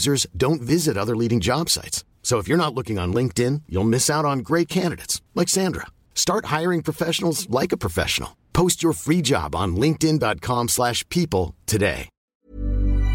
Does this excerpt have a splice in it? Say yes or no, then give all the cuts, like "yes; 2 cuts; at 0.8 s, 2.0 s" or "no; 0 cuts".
yes; 1 cut; at 12.2 s